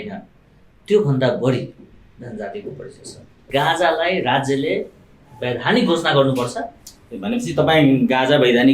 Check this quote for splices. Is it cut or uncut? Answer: cut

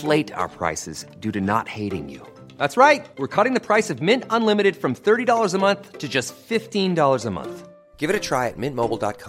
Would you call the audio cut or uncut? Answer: uncut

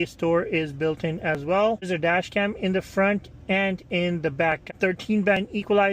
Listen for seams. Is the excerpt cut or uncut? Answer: cut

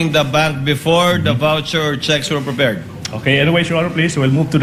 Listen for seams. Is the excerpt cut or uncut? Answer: uncut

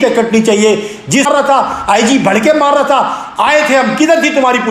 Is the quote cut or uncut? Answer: cut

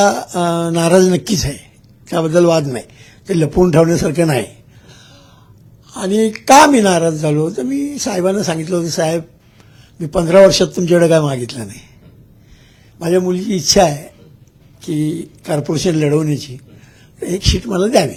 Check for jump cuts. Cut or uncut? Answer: uncut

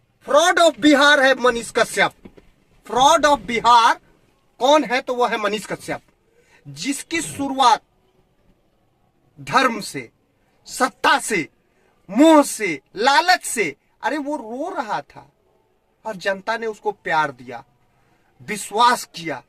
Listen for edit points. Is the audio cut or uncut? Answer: uncut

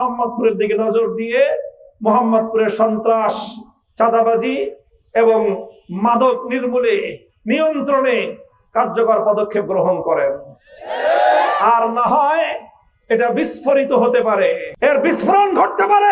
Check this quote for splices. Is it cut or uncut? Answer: cut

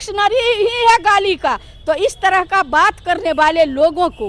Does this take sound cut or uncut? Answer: uncut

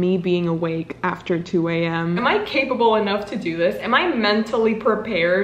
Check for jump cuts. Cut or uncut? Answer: cut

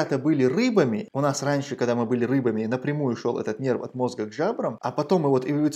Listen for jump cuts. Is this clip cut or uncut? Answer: cut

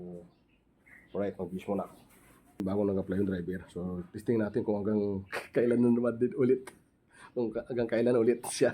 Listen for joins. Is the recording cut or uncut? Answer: cut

